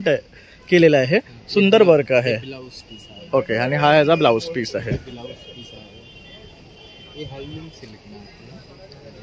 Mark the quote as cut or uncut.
uncut